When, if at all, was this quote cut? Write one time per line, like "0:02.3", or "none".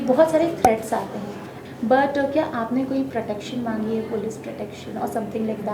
0:01.5